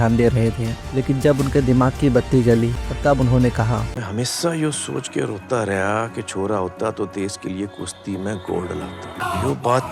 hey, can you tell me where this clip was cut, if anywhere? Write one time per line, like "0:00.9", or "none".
0:02.8